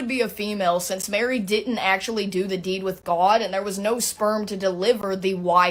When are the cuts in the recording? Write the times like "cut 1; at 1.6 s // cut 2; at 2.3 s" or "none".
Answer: none